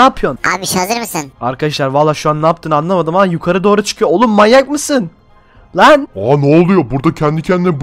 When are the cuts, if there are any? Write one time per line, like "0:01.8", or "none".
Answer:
none